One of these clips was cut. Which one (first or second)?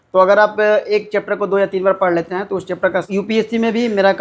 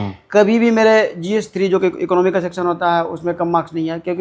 first